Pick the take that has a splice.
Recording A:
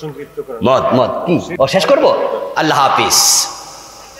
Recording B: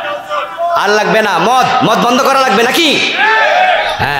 A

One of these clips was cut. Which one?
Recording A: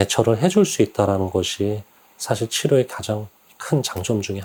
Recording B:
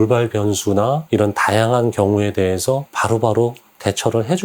B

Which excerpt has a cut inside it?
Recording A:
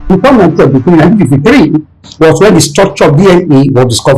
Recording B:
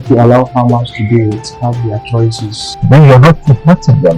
B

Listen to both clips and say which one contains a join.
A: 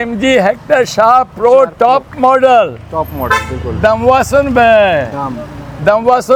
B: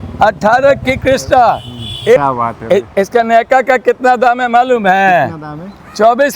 B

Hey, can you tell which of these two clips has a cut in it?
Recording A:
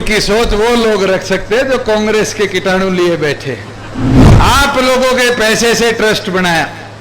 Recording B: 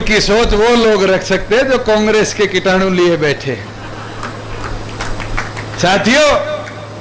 A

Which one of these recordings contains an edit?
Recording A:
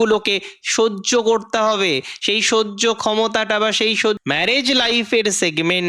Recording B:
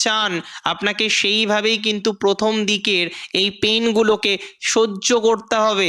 A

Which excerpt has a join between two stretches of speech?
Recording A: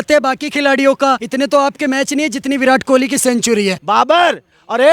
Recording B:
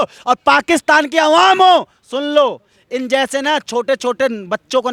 A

